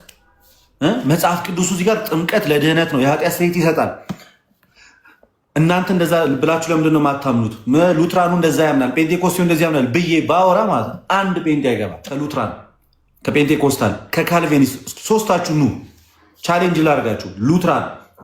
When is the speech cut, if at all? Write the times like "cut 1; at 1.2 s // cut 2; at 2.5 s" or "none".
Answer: cut 1; at 12.0 s